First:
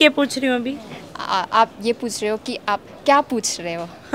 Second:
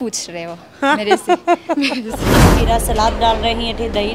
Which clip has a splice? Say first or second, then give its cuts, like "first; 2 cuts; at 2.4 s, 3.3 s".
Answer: second; 1 cut; at 2.5 s